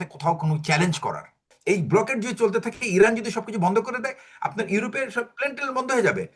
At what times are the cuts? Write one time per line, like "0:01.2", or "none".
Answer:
0:01.5